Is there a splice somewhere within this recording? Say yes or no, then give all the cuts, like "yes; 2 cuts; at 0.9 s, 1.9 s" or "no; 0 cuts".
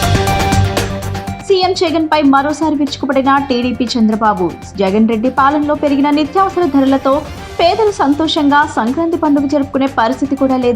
no; 0 cuts